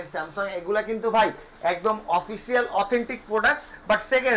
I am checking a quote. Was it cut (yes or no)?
no